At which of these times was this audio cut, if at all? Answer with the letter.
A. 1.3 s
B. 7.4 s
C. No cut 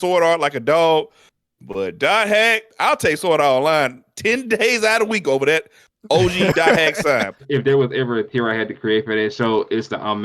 B